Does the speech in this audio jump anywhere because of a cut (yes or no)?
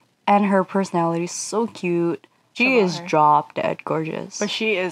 yes